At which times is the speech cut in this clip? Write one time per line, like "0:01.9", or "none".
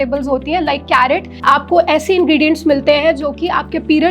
0:01.3

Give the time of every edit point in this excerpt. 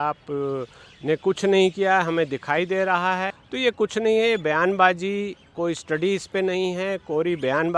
0:03.3

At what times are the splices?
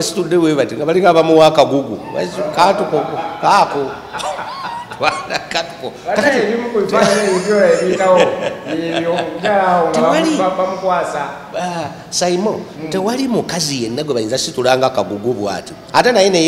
none

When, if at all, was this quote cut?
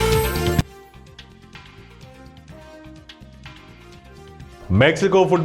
0:03.6

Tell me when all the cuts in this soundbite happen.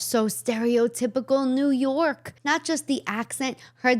0:02.3

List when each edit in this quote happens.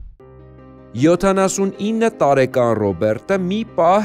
0:00.9

